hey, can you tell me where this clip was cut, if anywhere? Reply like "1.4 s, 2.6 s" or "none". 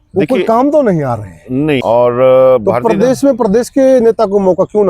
1.8 s